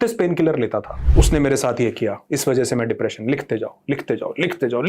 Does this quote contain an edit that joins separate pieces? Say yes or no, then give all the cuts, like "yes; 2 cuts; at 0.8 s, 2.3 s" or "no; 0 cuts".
yes; 1 cut; at 1.0 s